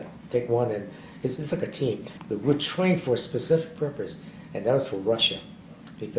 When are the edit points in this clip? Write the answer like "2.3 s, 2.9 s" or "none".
2.1 s